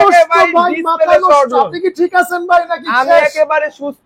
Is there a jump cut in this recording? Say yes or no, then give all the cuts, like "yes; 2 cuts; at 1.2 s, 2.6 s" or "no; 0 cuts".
no; 0 cuts